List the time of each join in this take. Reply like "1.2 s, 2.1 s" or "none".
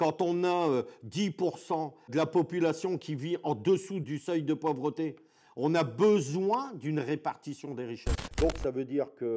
2.1 s, 8.2 s